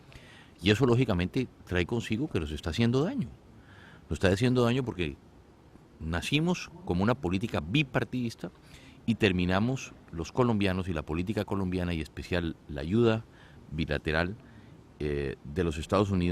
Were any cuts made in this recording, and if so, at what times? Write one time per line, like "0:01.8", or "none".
none